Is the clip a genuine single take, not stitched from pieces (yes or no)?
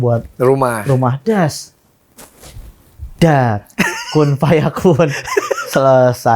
yes